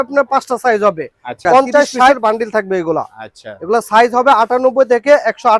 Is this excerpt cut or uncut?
cut